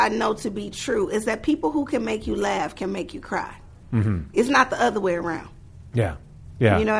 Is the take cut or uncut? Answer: uncut